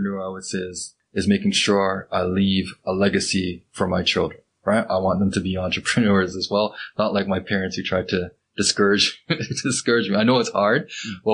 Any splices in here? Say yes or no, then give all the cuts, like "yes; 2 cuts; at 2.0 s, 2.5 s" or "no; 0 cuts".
yes; 1 cut; at 1.0 s